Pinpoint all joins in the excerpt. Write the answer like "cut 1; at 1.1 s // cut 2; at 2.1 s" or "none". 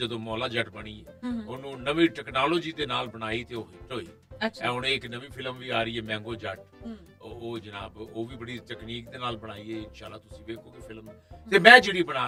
none